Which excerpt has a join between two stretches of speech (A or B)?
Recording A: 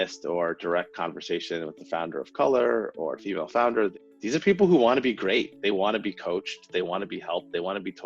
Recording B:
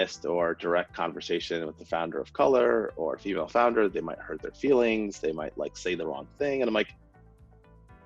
A